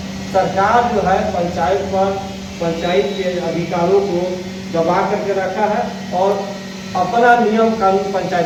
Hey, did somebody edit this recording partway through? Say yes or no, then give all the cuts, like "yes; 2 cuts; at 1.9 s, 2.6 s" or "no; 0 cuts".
no; 0 cuts